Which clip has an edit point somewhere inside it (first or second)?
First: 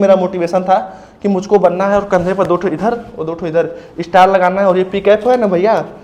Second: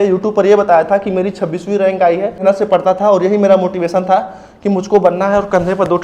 second